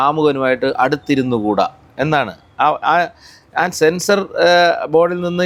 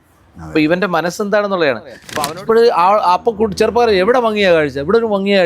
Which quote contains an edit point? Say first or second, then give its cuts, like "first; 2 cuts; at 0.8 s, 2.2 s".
second; 1 cut; at 2.1 s